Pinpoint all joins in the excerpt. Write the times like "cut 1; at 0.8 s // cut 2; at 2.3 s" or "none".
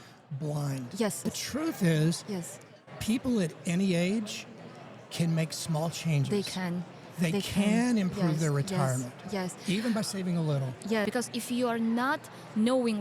cut 1; at 1.2 s // cut 2; at 11.0 s